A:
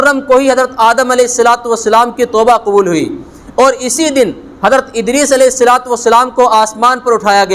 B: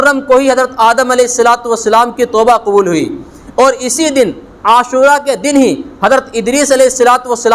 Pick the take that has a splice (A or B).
A